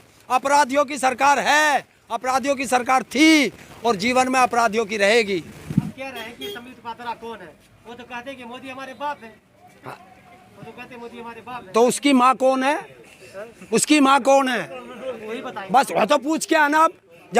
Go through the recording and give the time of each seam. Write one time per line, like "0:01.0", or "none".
0:06.0